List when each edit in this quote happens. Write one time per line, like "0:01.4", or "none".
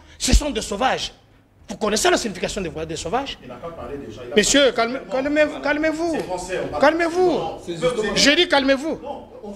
none